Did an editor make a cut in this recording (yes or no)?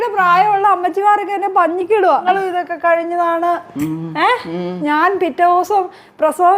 yes